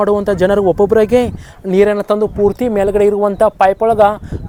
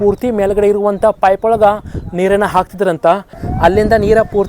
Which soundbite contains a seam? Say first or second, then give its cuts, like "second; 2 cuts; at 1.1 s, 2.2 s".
second; 1 cut; at 3.4 s